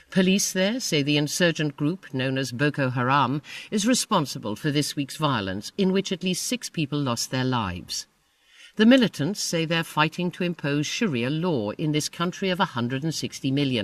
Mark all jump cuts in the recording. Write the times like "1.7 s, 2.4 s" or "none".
12.9 s